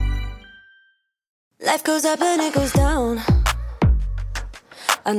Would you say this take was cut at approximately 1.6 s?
yes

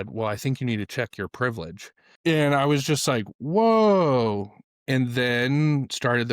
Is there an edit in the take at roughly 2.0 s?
yes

